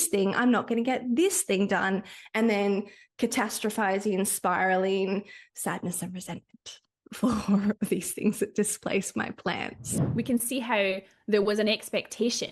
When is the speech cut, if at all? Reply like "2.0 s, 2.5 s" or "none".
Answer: 10.0 s

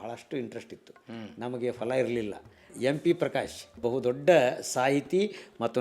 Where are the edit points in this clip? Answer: 2.6 s, 3.8 s

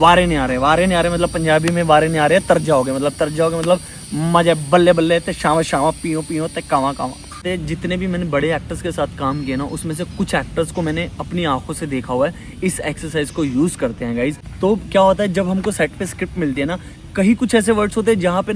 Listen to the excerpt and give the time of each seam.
7.4 s, 14.4 s

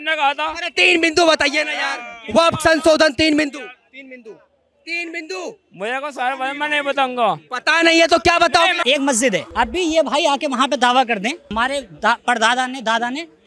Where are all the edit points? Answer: 9.0 s, 11.5 s

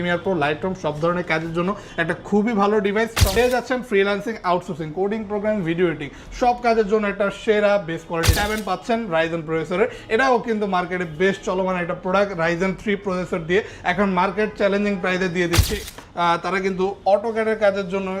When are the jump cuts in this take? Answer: 3.4 s, 8.3 s, 15.8 s

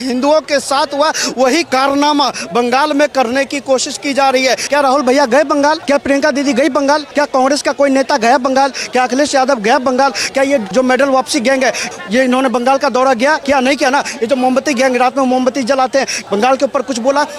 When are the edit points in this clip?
1.7 s, 4.6 s, 5.8 s, 7.1 s, 10.7 s, 11.9 s, 13.4 s, 16.2 s

